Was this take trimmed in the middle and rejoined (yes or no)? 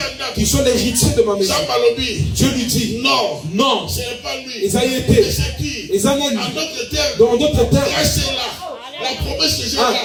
no